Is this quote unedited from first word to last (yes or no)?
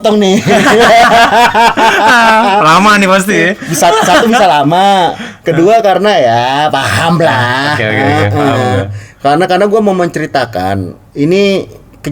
yes